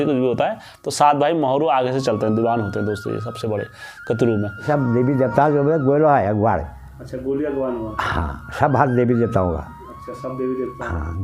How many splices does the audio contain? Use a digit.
1